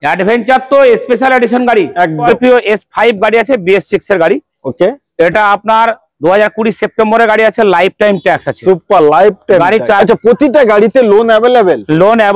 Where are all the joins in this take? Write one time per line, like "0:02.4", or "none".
0:02.3
0:10.0